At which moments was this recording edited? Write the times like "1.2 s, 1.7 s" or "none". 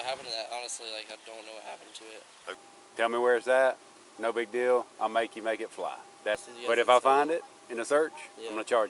2.5 s, 6.4 s